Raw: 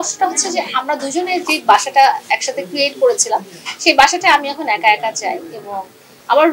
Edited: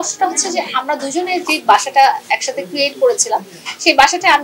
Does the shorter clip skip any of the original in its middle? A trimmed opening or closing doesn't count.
no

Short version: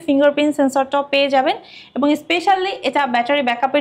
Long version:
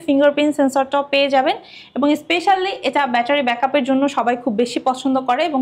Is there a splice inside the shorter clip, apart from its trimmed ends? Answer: no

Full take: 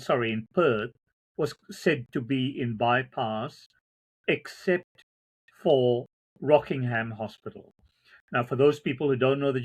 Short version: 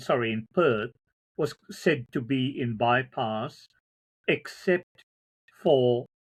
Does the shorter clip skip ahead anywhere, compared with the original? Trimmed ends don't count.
no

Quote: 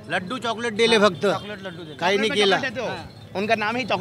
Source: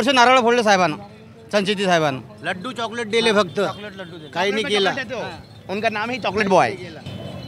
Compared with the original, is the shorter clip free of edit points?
yes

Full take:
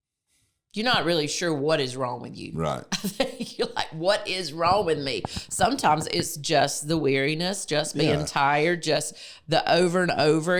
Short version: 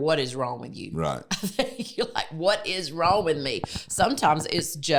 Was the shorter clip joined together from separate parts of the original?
no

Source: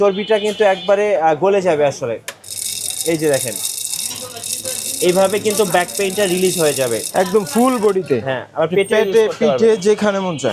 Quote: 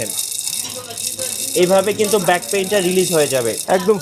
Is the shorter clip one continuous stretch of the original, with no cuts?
yes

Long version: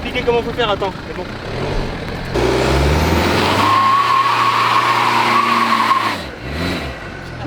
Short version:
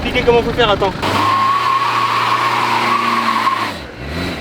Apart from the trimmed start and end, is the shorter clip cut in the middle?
yes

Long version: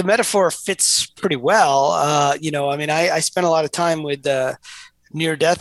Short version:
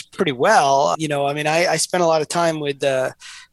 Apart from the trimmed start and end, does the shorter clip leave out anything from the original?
yes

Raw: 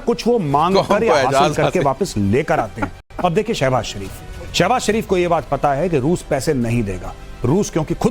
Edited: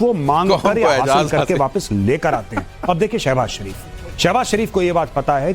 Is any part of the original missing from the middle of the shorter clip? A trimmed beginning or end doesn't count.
yes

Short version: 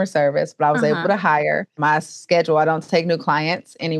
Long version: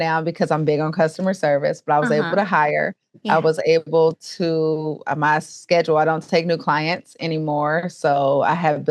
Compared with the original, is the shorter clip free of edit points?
no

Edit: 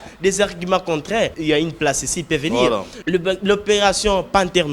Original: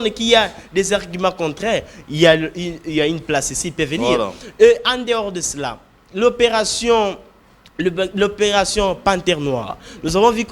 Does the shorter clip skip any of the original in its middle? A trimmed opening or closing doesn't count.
yes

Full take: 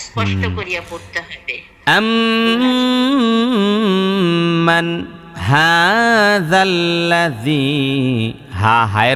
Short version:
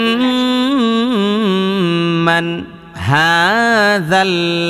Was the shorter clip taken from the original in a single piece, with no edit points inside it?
yes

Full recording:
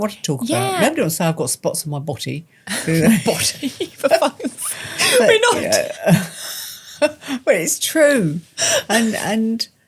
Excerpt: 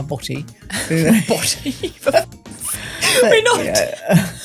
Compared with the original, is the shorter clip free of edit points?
yes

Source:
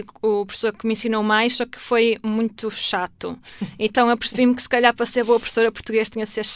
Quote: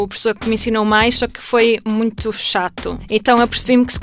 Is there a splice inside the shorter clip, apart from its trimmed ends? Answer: yes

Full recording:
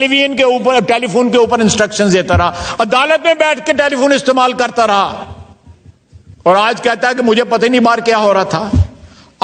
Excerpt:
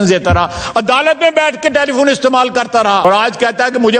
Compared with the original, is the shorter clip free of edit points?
no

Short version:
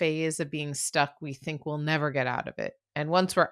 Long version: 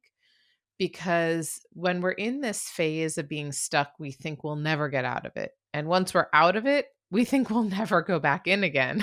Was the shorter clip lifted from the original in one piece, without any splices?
yes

